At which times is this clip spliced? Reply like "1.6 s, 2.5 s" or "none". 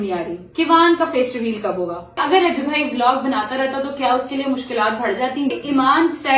2.2 s, 5.5 s